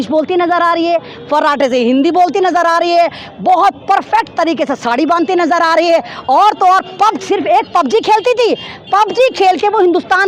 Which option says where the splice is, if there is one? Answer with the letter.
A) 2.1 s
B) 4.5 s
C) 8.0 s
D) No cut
D